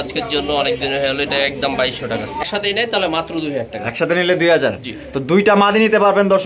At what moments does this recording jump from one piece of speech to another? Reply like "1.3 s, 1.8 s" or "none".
2.4 s

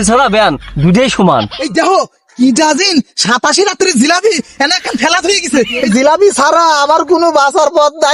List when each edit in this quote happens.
1.6 s, 5.8 s

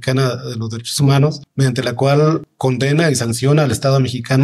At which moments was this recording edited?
1.4 s, 2.5 s

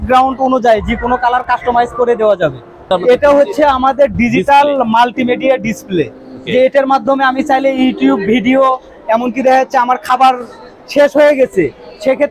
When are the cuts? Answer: 2.9 s

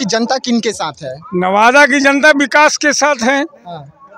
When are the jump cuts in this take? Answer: none

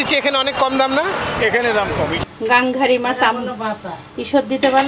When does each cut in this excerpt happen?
2.2 s

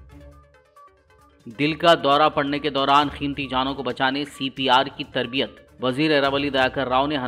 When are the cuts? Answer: 0.9 s

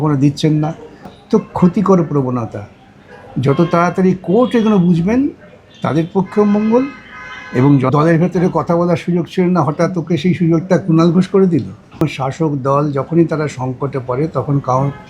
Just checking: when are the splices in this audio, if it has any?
1.2 s, 7.9 s, 12.0 s

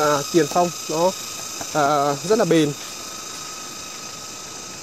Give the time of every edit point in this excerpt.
none

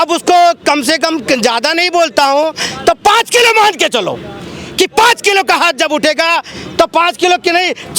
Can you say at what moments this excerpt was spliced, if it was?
none

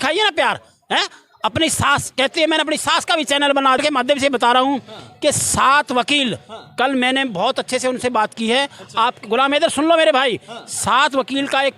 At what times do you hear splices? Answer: 3.8 s

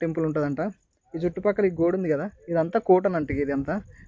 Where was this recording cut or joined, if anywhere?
none

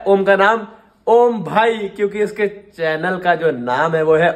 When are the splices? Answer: none

